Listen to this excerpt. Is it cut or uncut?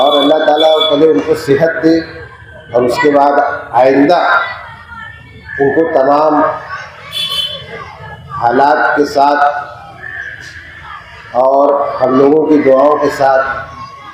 uncut